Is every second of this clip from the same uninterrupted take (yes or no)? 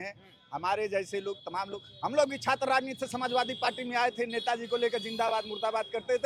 yes